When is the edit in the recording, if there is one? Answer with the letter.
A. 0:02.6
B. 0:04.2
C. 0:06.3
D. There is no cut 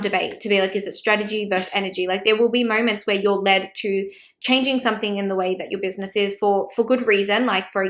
D